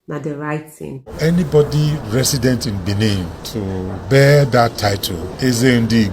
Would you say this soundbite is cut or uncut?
cut